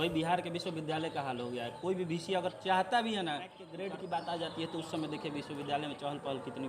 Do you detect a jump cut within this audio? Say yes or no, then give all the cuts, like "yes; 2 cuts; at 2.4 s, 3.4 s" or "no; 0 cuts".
yes; 1 cut; at 3.7 s